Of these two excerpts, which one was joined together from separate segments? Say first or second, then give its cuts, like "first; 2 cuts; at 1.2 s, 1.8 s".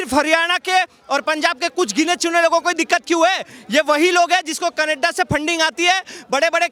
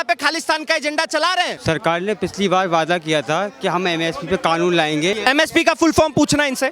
second; 2 cuts; at 1.6 s, 5.1 s